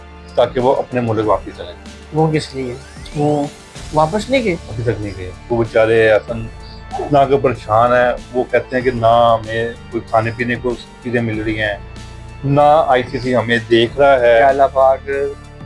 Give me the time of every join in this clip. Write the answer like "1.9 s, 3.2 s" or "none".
none